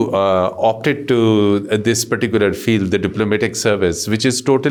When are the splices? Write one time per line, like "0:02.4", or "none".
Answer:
none